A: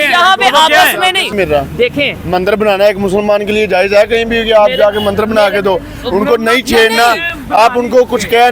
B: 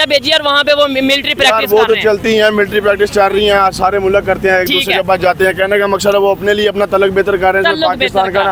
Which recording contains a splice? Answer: A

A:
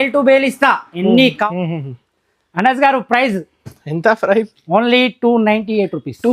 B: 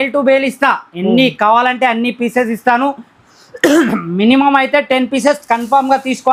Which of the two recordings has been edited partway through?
A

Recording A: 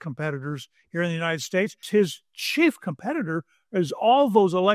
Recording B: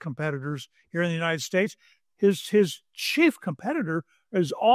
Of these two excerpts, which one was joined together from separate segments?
A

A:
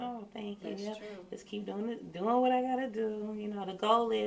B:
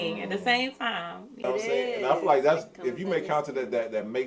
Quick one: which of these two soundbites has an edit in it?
B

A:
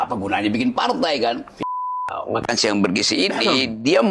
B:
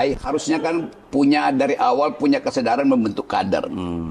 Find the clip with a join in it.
A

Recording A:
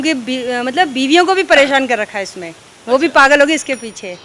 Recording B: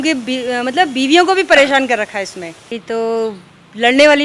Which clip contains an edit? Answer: B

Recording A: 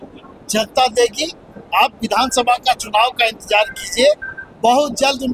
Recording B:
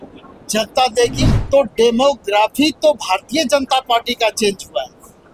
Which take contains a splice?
B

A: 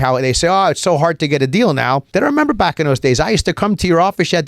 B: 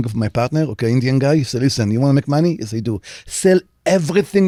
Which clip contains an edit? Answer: A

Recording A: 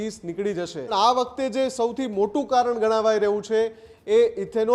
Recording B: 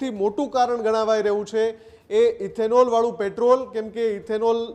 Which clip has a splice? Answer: A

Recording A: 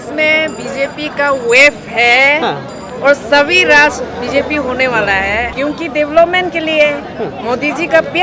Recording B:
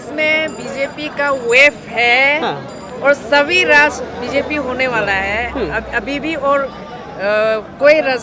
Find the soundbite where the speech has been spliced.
A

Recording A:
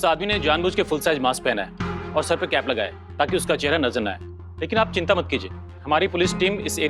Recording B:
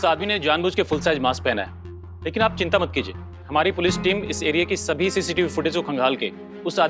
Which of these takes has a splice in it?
B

